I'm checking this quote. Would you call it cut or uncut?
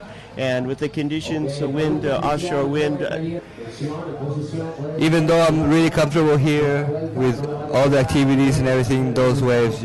uncut